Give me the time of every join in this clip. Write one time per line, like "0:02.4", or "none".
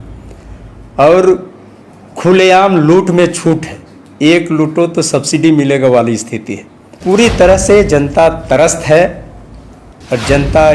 0:07.0

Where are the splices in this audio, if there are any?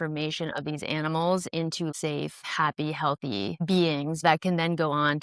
0:01.9
0:04.2

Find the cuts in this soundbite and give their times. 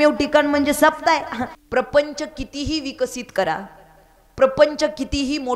0:01.4

